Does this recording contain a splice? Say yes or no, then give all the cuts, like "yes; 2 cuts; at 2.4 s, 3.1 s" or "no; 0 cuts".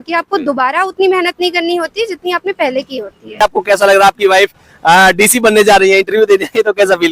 yes; 1 cut; at 3.4 s